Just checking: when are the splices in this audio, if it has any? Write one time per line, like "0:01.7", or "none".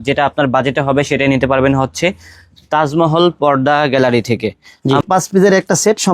0:05.0